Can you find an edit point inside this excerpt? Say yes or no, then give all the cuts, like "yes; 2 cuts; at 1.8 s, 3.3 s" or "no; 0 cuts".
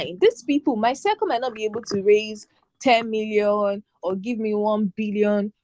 no; 0 cuts